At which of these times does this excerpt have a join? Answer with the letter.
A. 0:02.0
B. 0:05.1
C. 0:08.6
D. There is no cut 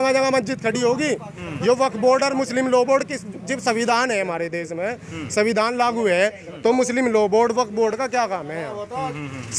D